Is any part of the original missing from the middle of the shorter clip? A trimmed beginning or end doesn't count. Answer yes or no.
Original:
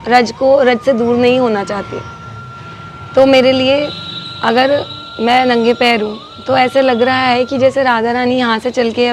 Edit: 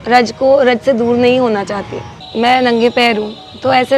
yes